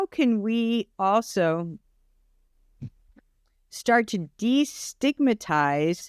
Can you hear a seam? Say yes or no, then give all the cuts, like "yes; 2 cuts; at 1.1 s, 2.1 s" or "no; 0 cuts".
no; 0 cuts